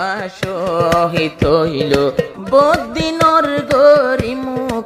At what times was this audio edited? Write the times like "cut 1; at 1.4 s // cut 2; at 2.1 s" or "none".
cut 1; at 2.4 s